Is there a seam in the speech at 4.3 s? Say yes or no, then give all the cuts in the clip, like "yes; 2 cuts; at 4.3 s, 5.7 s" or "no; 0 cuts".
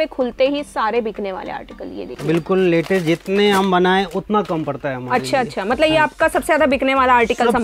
no; 1 cut; at 2.1 s